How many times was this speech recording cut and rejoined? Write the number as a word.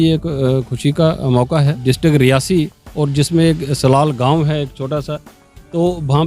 one